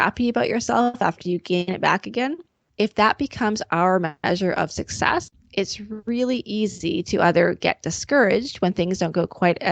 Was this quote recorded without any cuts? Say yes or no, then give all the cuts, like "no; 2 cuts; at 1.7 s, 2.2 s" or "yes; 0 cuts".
no; 3 cuts; at 2.6 s, 4.2 s, 5.4 s